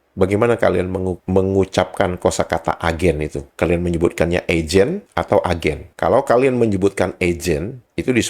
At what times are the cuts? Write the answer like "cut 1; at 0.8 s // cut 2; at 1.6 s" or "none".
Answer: cut 1; at 3.4 s

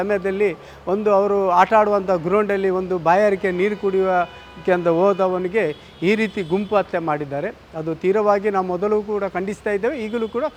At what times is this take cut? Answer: none

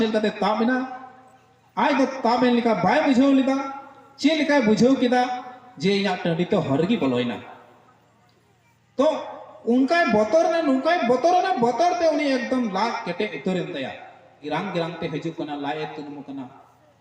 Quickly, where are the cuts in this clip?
cut 1; at 14.4 s

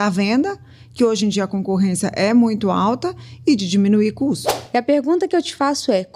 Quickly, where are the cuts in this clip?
cut 1; at 4.5 s

